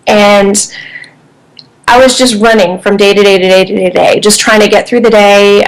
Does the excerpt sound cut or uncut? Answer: cut